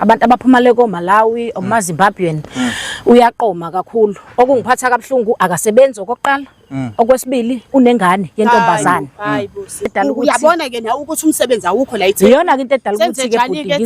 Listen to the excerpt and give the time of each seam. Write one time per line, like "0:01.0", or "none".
0:09.9